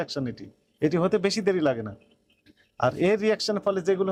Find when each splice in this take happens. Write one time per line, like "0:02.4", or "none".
none